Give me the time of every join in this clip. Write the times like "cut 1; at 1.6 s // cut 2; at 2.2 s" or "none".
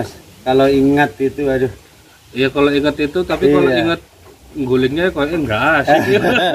none